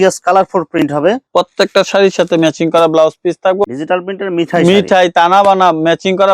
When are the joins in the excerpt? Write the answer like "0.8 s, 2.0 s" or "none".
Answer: 3.7 s